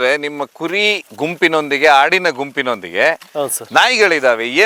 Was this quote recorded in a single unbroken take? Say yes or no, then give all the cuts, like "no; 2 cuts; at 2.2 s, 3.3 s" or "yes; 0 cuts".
yes; 0 cuts